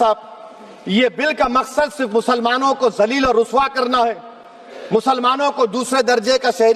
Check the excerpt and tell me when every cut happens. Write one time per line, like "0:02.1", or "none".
none